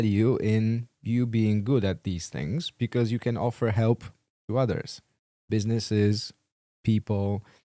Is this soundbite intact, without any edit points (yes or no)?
yes